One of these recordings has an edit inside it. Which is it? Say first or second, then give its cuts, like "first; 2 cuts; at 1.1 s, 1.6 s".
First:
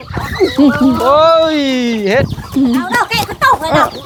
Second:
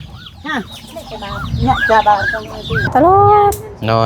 second; 1 cut; at 2.9 s